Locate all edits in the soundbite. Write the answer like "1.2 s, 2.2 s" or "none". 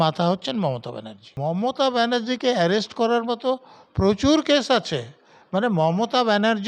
1.3 s